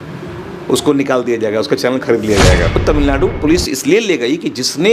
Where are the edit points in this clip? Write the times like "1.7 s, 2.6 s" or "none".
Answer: 2.8 s